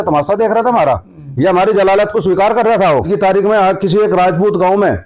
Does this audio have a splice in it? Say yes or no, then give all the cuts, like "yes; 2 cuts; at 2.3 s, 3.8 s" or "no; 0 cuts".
yes; 1 cut; at 3.1 s